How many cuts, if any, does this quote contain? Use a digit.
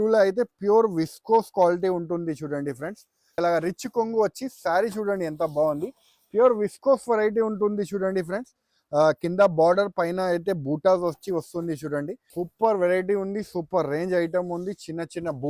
2